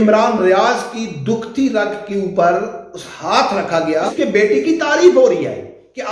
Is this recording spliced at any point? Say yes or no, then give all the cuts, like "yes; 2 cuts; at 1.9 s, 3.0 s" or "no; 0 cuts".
yes; 1 cut; at 4.1 s